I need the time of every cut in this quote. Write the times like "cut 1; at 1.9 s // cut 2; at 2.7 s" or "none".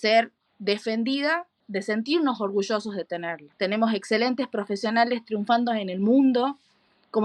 cut 1; at 1.6 s // cut 2; at 3.4 s